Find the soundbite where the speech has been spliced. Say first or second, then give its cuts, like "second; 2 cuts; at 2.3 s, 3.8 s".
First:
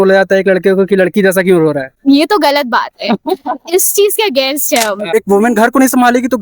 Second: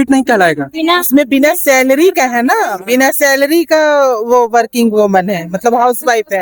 first; 2 cuts; at 1.9 s, 5.1 s